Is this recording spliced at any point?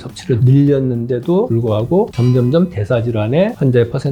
no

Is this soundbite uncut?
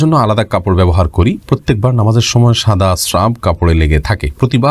yes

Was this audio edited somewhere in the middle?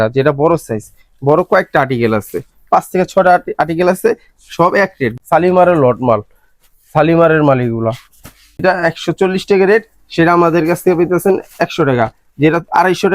yes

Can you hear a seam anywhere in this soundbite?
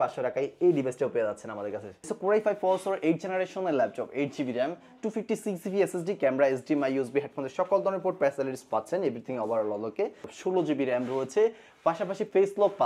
yes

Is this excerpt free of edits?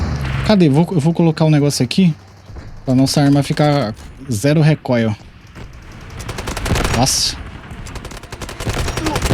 yes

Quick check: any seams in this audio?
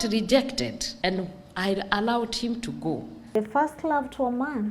yes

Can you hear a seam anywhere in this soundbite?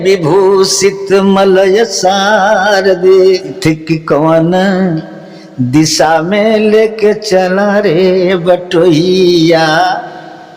yes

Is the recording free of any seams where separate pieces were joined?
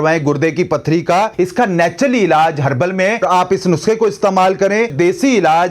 no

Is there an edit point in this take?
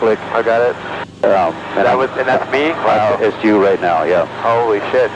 no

